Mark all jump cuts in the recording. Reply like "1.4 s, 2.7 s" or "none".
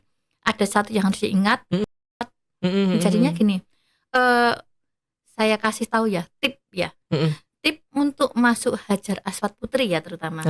2.2 s